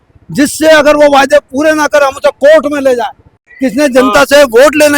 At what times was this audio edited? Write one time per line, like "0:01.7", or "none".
none